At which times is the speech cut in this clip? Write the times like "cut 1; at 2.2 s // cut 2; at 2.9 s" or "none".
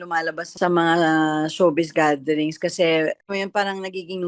cut 1; at 3.2 s